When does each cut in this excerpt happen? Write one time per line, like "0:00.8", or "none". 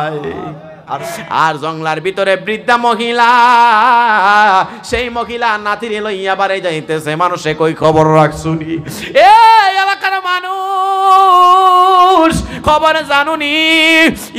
0:01.0

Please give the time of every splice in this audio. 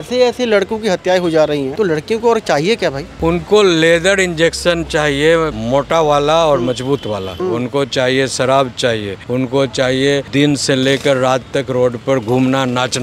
0:01.7
0:03.1
0:05.6
0:07.3
0:09.1
0:10.3

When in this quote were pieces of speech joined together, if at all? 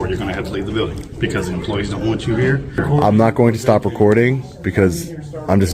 0:02.8

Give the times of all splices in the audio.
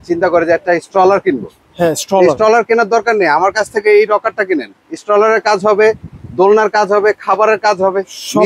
none

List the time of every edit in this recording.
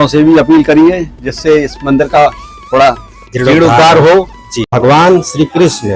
0:04.7

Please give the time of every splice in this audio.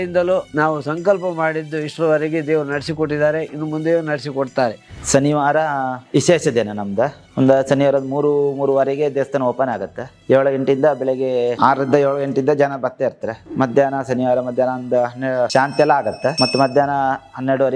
0:04.8

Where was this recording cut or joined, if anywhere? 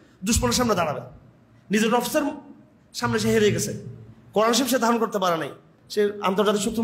0:05.7

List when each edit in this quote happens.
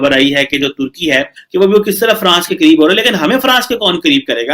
0:01.4

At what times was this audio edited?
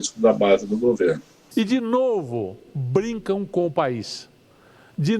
0:01.3

